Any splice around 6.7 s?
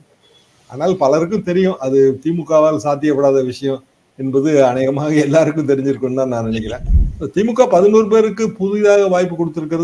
yes; 1 cut; at 6.7 s

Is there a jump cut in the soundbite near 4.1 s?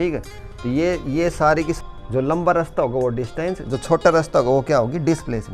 no; 1 cut; at 1.8 s

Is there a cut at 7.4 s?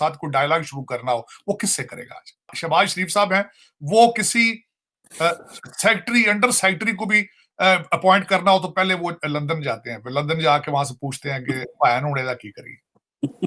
no; 1 cut; at 2.6 s

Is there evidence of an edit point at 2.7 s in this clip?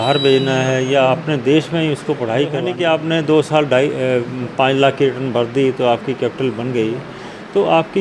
yes; 1 cut; at 2.7 s

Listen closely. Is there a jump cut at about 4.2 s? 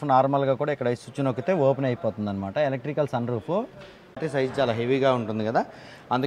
yes; 1 cut; at 4.2 s

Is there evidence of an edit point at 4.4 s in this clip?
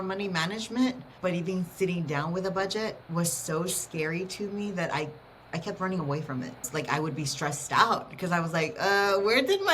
no; 3 cuts; at 1.1 s, 3.0 s, 6.7 s

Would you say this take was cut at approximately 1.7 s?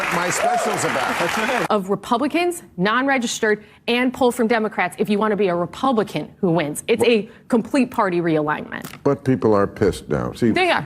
yes; 1 cut; at 1.7 s

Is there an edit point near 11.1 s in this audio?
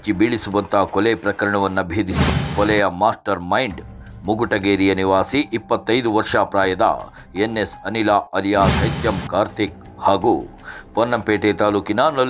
no; 2 cuts; at 2.2 s, 8.8 s

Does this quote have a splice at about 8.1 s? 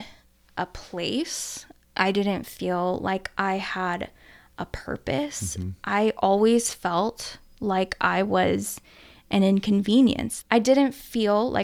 no; 1 cut; at 10.3 s

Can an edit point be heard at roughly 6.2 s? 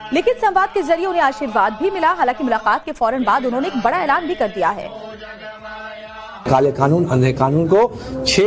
no; 1 cut; at 4.9 s

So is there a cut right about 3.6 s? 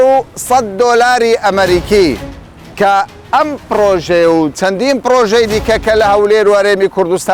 no; 0 cuts

